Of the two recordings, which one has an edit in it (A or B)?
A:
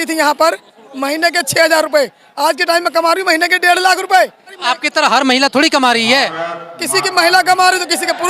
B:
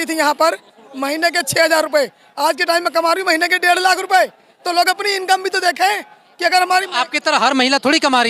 A